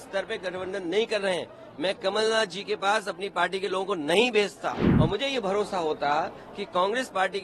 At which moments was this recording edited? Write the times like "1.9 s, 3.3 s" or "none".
4.8 s